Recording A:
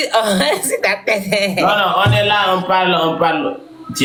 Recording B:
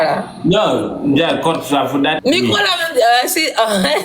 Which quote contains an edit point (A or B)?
B